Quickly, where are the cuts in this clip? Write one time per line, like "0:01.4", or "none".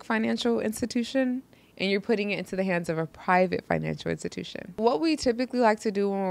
0:04.7